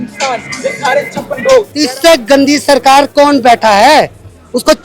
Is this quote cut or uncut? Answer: cut